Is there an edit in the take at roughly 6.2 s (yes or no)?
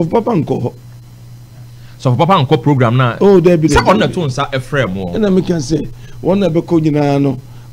no